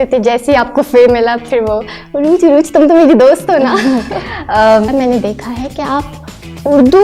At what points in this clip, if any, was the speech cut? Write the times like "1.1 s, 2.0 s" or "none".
4.9 s